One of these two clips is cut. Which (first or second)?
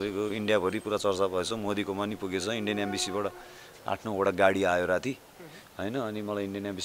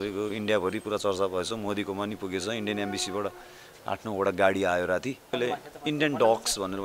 second